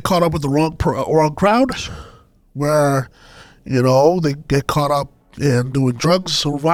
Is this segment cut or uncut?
uncut